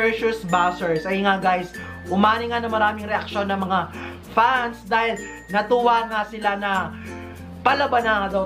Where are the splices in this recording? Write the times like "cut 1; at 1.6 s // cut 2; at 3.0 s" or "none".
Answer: none